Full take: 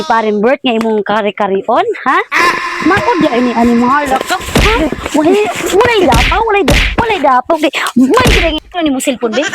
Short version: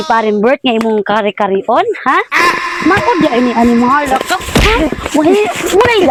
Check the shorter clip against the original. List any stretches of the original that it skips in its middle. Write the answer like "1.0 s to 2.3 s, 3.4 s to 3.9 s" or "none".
none